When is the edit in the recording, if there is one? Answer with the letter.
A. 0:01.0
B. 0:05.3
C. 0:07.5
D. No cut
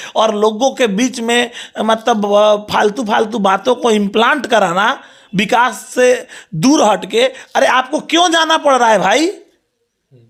D